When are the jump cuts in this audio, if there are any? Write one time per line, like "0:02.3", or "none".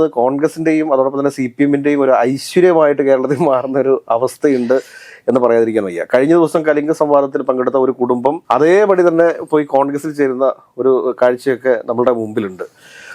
none